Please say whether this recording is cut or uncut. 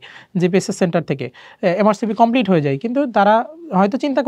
uncut